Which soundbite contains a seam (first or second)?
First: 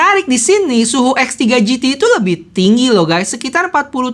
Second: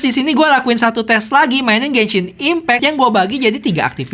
second